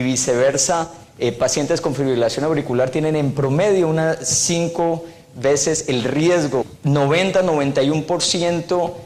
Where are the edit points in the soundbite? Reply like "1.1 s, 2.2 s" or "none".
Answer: none